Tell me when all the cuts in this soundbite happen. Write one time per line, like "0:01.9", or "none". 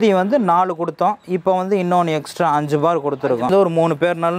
0:03.5